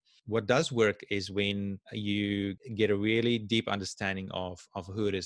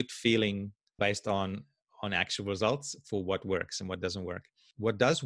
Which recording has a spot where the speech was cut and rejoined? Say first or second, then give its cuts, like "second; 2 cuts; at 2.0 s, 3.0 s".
first; 2 cuts; at 1.9 s, 2.6 s